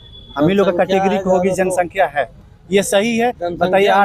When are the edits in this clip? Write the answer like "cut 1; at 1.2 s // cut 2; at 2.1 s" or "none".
none